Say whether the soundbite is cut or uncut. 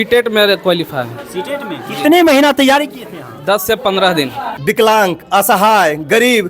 cut